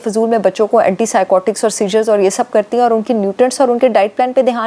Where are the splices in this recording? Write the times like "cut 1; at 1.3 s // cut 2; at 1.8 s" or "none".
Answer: none